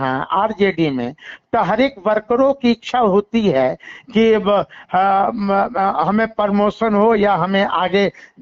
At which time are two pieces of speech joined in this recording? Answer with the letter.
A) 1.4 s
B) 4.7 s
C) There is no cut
C